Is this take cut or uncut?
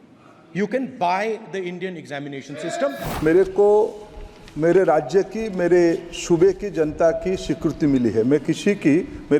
cut